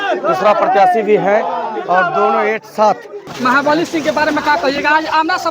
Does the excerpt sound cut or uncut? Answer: cut